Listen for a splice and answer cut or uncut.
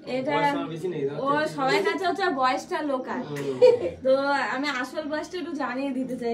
uncut